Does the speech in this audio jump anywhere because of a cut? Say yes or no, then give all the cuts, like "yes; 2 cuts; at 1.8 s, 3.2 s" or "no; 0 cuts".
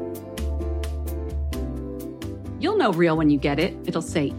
yes; 1 cut; at 1.1 s